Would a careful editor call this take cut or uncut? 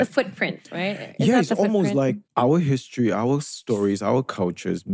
uncut